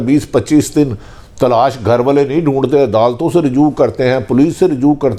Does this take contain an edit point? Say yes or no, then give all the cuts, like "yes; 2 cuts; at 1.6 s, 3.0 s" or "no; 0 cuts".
no; 0 cuts